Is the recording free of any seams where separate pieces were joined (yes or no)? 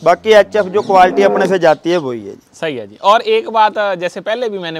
yes